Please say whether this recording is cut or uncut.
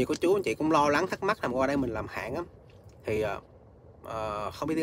uncut